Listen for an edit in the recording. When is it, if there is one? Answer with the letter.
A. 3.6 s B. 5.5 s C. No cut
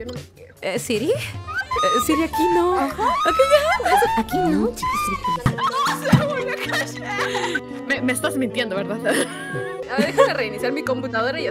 B